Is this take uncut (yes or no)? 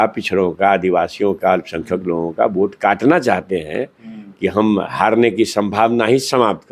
yes